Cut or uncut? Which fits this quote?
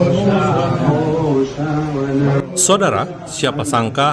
uncut